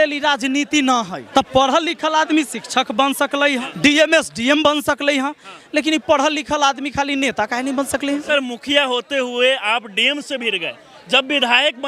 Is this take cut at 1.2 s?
yes; 3 cuts; at 1.2 s, 3.7 s, 8.2 s

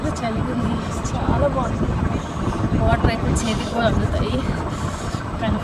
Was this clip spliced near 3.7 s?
no; 0 cuts

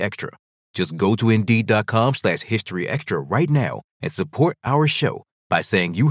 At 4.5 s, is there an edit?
no; 0 cuts

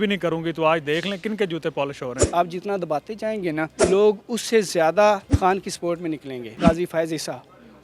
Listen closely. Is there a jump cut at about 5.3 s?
yes; 4 cuts; at 2.2 s, 3.8 s, 5.3 s, 6.6 s

